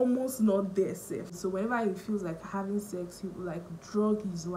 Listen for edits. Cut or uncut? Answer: cut